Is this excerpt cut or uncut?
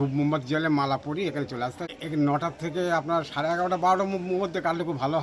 cut